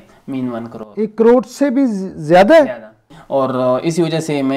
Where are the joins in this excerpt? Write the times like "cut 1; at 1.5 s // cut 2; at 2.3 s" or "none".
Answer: cut 1; at 3.1 s